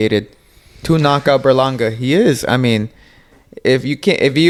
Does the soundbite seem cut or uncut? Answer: uncut